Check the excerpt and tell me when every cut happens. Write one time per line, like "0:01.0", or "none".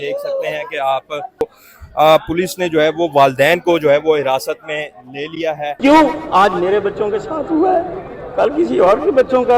0:01.4
0:05.8